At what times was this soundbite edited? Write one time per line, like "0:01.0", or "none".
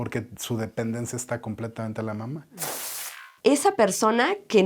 0:02.9